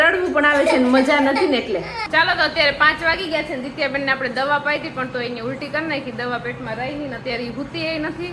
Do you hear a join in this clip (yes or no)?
no